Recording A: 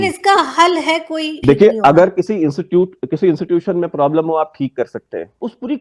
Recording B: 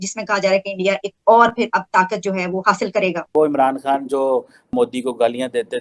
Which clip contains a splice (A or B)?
B